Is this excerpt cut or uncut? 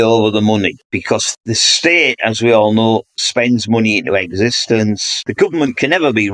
cut